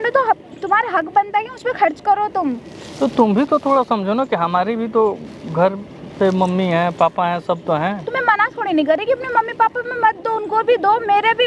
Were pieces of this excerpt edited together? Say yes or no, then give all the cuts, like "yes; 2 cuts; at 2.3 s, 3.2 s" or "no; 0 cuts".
no; 0 cuts